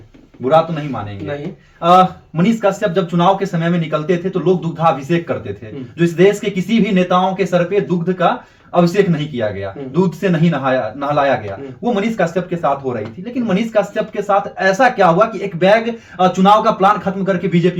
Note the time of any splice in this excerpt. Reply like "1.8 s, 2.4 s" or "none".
none